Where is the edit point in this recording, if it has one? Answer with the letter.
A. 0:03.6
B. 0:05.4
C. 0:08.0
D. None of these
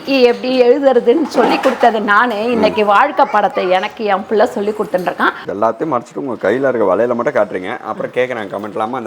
B